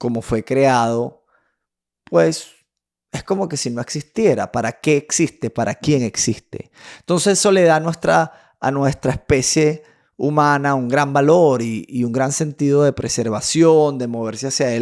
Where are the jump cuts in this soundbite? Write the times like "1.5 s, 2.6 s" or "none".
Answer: none